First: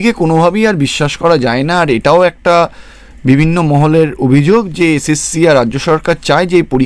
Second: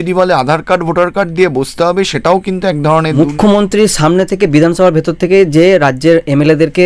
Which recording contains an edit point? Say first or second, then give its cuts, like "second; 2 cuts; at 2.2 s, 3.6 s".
second; 1 cut; at 3.1 s